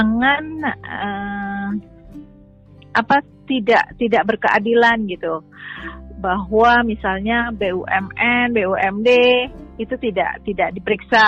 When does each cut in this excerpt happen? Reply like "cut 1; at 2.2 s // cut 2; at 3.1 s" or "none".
none